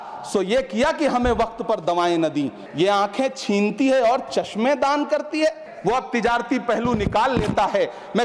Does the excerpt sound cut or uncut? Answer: cut